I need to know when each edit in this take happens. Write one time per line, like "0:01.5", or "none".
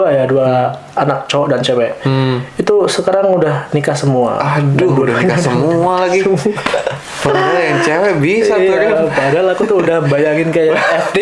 none